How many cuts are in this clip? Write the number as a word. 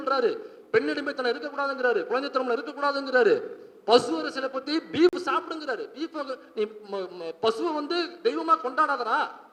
zero